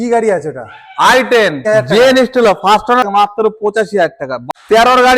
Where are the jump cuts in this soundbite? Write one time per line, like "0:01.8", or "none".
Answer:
0:01.6
0:03.0
0:04.4